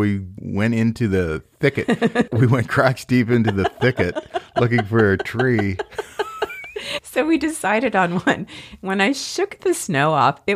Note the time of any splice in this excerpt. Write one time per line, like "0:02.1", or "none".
none